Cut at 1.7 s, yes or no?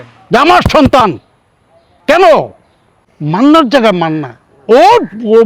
no